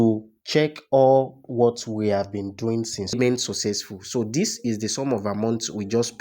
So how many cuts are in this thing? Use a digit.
1